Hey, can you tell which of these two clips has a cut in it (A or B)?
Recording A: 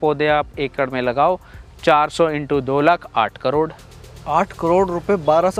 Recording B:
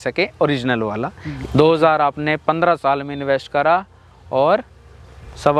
B